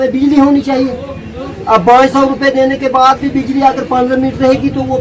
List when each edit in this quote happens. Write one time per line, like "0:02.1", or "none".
none